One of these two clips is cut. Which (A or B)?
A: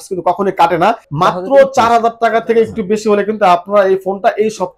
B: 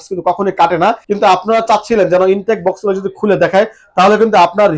A